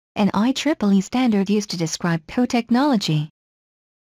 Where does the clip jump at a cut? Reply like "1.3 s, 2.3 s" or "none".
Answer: 1.5 s